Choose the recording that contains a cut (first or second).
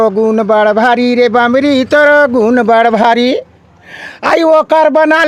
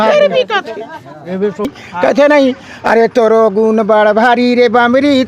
second